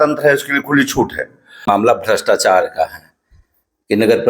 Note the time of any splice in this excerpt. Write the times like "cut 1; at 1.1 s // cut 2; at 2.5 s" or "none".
cut 1; at 1.5 s